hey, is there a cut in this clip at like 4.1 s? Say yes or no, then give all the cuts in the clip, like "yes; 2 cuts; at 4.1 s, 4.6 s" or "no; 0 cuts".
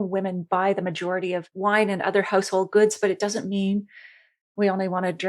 no; 1 cut; at 1.5 s